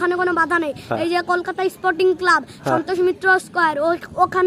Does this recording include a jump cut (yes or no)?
no